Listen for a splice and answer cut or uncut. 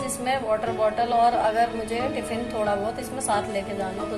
uncut